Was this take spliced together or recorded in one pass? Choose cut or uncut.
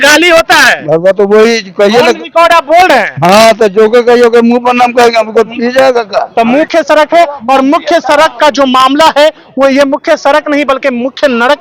cut